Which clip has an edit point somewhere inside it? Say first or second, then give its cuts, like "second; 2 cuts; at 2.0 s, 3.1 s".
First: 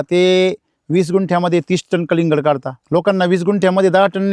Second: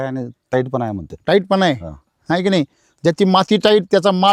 first; 1 cut; at 2.7 s